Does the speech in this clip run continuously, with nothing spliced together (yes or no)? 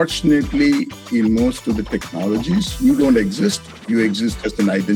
yes